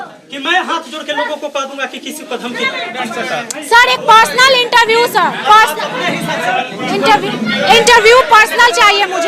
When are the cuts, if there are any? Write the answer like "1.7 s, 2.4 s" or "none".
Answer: 2.9 s